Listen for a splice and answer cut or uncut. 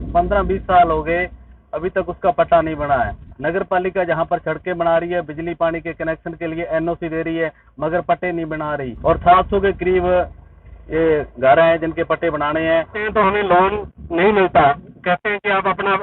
cut